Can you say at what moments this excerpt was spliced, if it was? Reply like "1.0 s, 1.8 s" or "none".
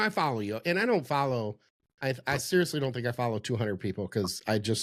none